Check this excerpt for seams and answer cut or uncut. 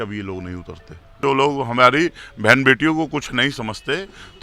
cut